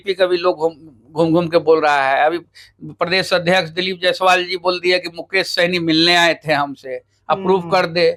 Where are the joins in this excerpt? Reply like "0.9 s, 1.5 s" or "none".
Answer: none